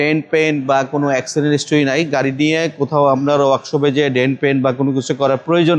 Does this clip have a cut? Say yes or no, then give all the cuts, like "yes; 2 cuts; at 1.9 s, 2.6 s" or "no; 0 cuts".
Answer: no; 0 cuts